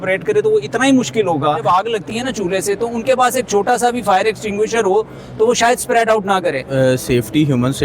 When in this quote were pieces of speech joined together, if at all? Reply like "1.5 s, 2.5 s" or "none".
1.6 s, 6.6 s